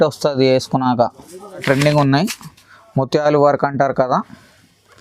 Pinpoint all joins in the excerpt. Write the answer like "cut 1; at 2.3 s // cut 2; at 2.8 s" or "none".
cut 1; at 1.6 s